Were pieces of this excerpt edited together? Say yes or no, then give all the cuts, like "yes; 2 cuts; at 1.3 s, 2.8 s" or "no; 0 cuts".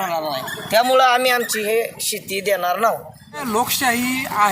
yes; 1 cut; at 3.4 s